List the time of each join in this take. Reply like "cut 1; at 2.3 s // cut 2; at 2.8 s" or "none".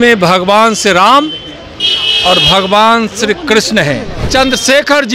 cut 1; at 4.1 s